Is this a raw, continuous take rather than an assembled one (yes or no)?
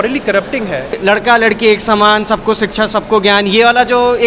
no